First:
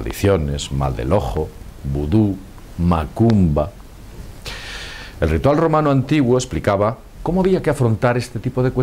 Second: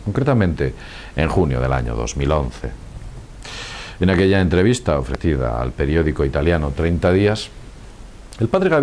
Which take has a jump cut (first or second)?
second